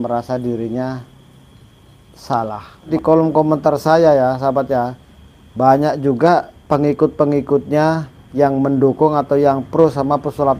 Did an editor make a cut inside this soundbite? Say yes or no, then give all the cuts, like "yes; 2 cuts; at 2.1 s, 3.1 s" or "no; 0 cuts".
yes; 1 cut; at 2.9 s